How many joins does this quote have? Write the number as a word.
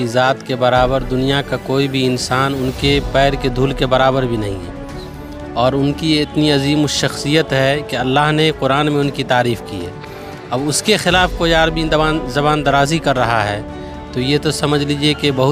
zero